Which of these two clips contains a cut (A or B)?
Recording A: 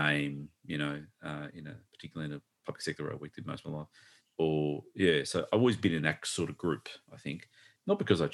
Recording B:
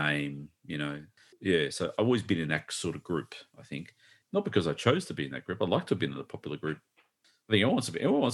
B